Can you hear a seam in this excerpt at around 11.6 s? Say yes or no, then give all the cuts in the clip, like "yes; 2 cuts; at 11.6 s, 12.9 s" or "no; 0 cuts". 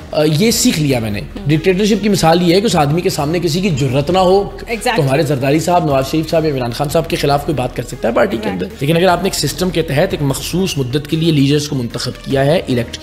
no; 2 cuts; at 1.3 s, 8.7 s